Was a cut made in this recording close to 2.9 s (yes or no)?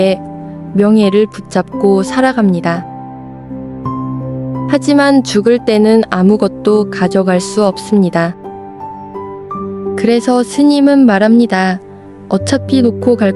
no